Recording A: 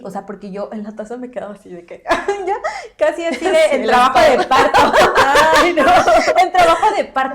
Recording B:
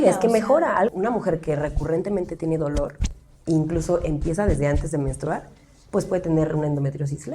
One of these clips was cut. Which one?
B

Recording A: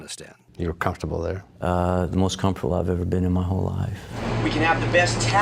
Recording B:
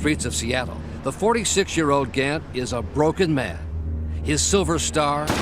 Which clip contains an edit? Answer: B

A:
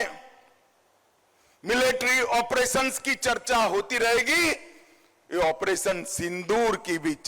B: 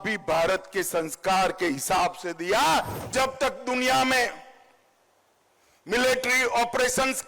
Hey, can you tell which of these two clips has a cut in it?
B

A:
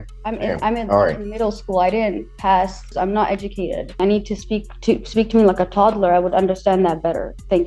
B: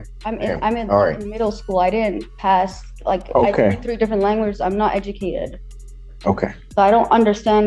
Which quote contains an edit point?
A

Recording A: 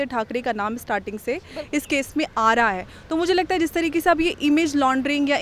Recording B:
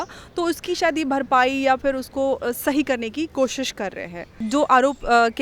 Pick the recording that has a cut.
B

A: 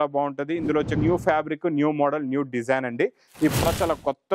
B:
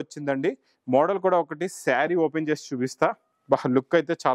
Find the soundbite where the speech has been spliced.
A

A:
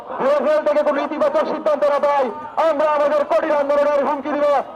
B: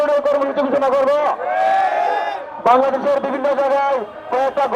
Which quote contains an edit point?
B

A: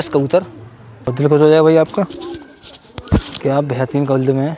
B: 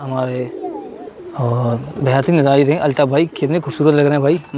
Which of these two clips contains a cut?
A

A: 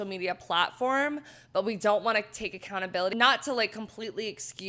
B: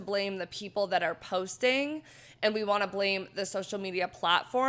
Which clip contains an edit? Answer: A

